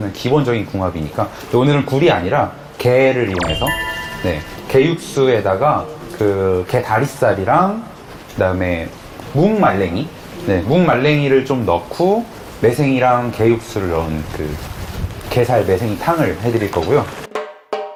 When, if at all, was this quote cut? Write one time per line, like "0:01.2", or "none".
none